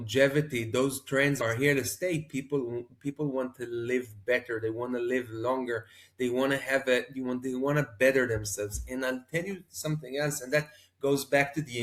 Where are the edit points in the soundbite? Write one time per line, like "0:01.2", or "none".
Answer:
none